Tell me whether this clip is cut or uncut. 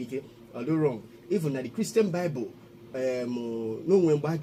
uncut